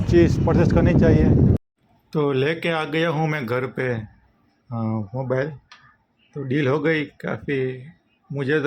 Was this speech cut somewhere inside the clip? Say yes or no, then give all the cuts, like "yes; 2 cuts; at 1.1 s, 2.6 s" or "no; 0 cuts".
yes; 1 cut; at 1.6 s